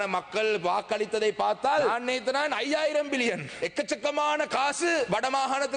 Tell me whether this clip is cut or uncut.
cut